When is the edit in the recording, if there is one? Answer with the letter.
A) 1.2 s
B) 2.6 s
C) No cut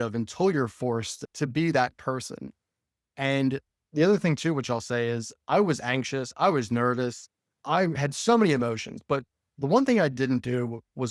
A